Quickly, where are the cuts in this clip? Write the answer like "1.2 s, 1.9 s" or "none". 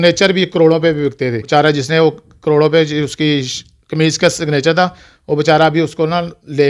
1.4 s

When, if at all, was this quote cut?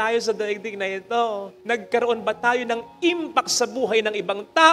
1.5 s

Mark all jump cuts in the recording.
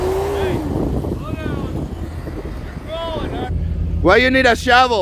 3.5 s

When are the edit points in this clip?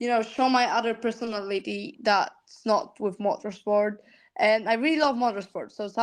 none

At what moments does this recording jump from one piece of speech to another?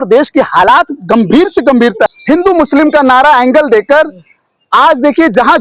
2.1 s

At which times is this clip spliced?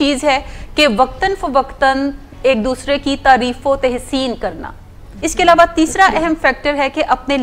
5.1 s

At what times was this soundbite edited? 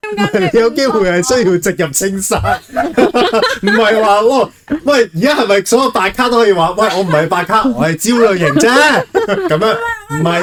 none

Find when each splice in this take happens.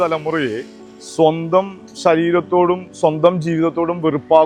none

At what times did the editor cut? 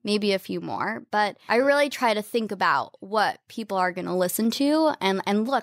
1.4 s

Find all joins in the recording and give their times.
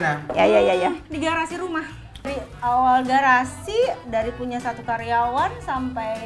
2.3 s

